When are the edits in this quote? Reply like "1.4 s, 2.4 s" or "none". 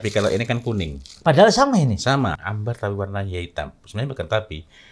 2.4 s